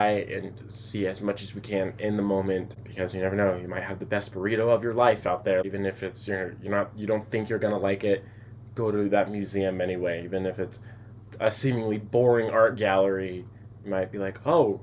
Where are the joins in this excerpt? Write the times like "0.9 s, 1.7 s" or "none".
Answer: 2.8 s, 5.6 s